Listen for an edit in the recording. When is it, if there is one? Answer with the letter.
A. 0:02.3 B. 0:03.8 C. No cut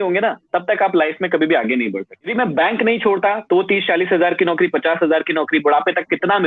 A